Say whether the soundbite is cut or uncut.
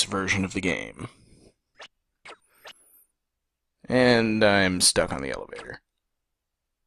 uncut